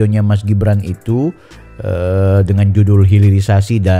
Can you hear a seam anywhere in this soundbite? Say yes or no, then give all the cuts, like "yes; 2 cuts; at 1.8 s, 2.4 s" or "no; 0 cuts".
no; 0 cuts